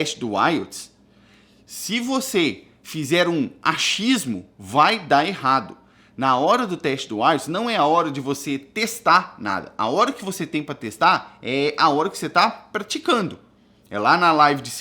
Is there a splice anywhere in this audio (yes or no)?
no